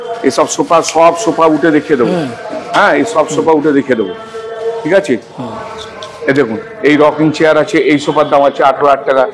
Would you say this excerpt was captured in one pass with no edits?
yes; 0 cuts

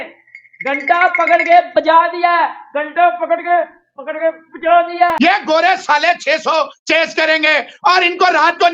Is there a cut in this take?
yes; 1 cut; at 5.1 s

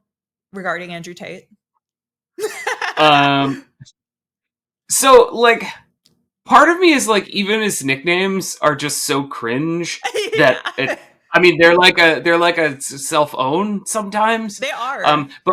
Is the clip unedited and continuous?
yes; 0 cuts

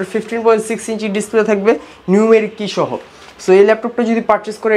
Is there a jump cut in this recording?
no; 0 cuts

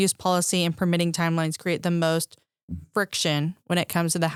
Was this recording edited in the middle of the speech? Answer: no; 0 cuts

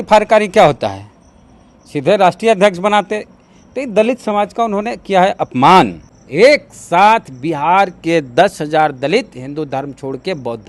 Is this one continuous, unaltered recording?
no; 1 cut; at 6.0 s

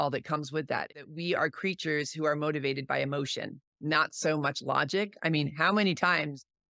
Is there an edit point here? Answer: yes; 1 cut; at 1.0 s

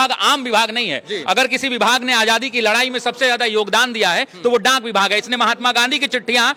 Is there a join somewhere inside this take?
no; 0 cuts

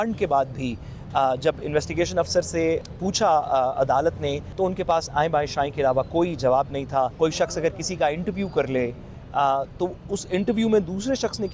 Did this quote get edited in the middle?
yes; 3 cuts; at 2.8 s, 4.5 s, 7.1 s

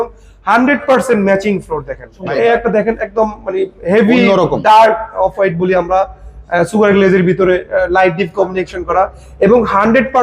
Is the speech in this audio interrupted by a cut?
yes; 1 cut; at 2.2 s

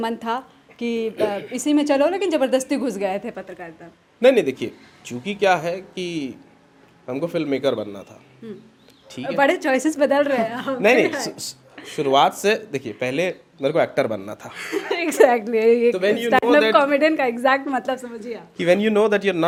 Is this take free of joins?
yes; 0 cuts

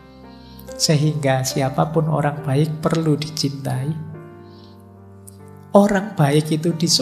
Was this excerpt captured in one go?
yes; 0 cuts

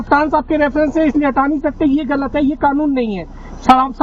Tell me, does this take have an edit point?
no; 0 cuts

